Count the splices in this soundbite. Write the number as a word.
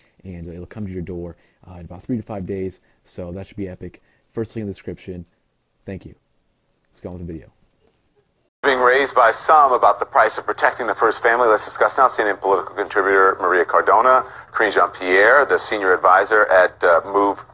zero